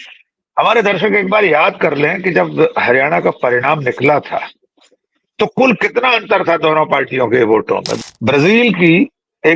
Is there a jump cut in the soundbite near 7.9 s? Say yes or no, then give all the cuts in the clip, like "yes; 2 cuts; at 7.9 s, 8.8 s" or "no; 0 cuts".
yes; 1 cut; at 7.9 s